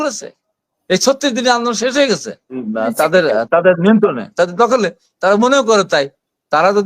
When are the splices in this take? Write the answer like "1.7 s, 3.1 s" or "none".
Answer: 2.6 s

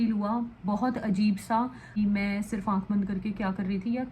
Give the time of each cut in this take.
2.0 s

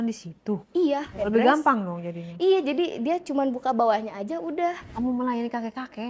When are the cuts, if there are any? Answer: 1.1 s, 4.9 s

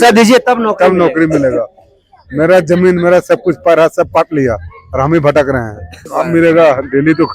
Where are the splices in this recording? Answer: 6.0 s

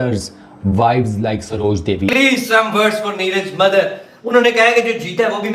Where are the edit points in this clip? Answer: 2.1 s

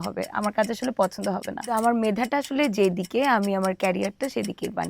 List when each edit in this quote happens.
1.7 s

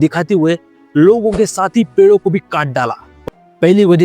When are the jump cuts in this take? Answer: 3.1 s

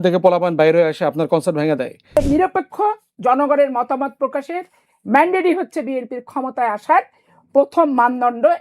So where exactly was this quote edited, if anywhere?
2.2 s

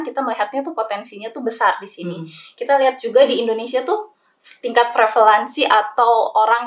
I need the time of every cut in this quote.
none

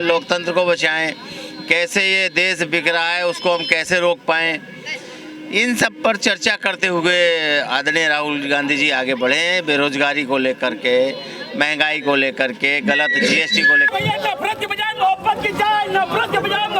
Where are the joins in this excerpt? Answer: 13.9 s

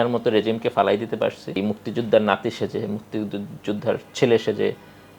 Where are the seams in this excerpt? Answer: 1.6 s

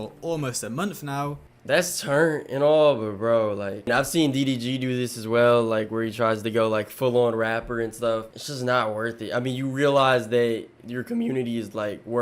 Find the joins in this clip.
3.9 s, 8.4 s

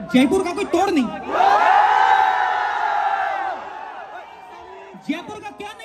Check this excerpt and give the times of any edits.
none

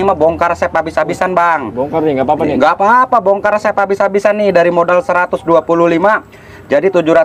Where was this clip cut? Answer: none

